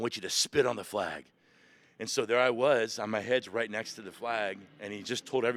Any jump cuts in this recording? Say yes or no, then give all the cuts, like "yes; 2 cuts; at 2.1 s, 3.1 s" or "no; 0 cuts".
no; 0 cuts